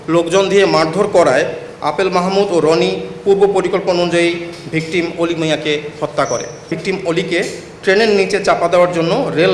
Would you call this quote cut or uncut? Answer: cut